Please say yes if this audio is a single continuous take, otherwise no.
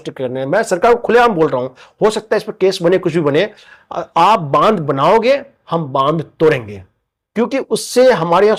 yes